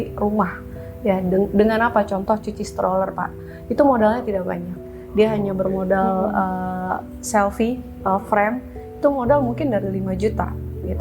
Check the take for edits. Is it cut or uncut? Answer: uncut